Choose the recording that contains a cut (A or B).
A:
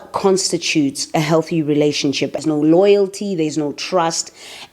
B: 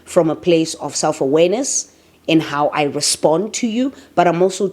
A